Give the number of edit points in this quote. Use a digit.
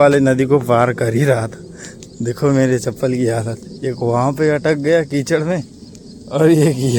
0